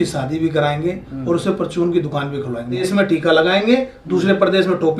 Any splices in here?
yes; 1 cut; at 2.8 s

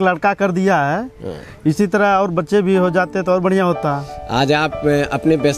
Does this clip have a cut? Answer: no; 0 cuts

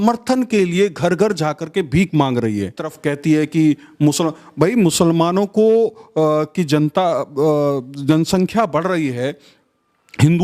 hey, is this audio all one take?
no; 1 cut; at 2.9 s

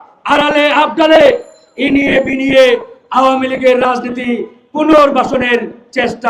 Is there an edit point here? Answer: no; 0 cuts

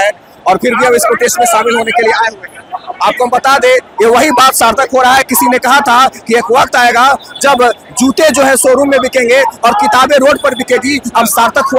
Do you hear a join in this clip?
no; 0 cuts

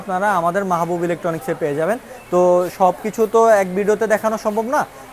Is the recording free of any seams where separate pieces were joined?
yes; 0 cuts

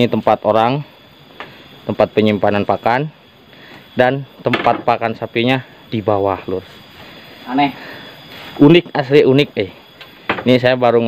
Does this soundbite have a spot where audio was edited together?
no; 0 cuts

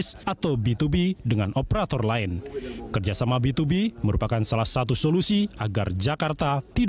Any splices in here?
yes; 1 cut; at 5.6 s

